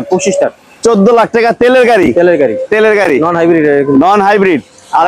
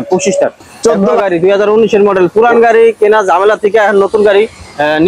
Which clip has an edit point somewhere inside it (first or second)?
second